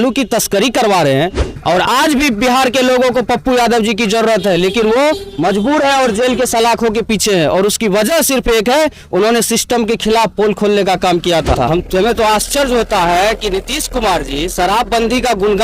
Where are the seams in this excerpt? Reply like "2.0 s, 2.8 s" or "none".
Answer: 1.5 s, 11.6 s